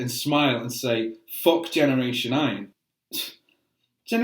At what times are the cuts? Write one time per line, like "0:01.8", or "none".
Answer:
0:02.6